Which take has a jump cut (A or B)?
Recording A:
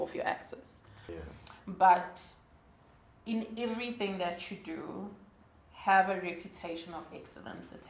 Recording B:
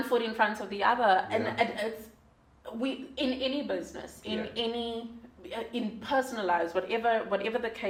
A